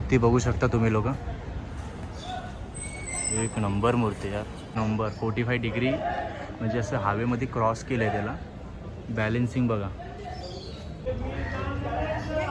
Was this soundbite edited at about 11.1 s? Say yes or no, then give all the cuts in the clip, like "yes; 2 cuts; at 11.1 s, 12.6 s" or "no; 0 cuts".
yes; 2 cuts; at 4.8 s, 11.1 s